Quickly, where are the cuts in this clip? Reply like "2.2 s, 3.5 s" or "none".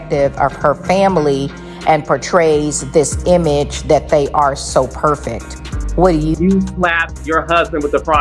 6.2 s